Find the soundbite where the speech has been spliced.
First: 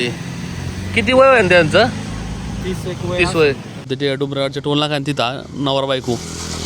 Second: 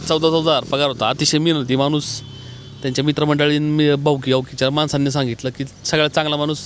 first; 1 cut; at 3.9 s

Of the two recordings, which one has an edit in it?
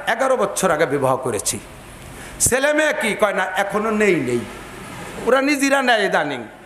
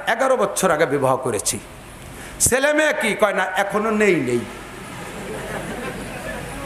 first; 1 cut; at 5.2 s

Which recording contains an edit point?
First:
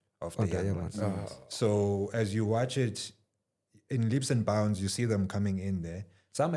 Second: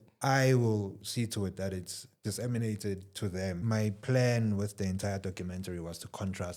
second; 1 cut; at 3.6 s

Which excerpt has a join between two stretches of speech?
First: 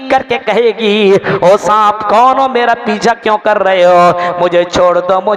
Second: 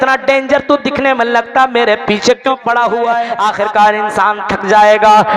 second; 1 cut; at 3.3 s

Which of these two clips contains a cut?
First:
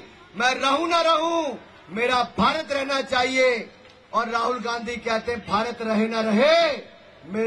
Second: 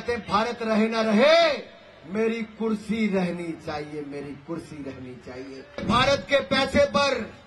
second; 1 cut; at 5.8 s

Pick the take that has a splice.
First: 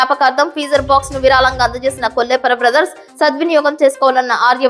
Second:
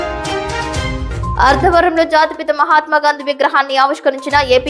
second; 1 cut; at 1.3 s

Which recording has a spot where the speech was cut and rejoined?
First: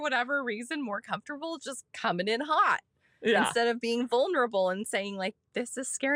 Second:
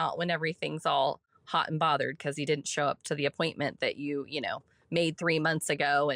second; 1 cut; at 1.3 s

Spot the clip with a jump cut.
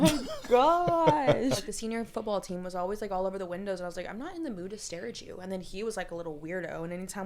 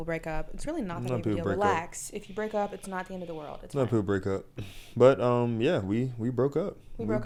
first; 1 cut; at 1.6 s

